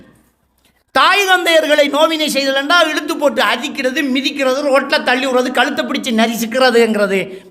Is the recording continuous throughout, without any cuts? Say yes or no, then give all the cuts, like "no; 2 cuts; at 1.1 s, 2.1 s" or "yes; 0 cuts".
yes; 0 cuts